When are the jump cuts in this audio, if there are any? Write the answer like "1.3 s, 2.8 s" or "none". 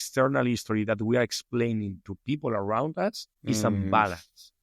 3.3 s